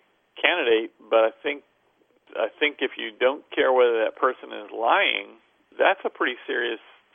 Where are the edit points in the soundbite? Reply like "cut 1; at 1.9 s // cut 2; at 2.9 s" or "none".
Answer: cut 1; at 2.2 s // cut 2; at 5.7 s